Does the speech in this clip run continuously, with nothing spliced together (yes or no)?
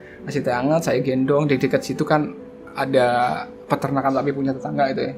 yes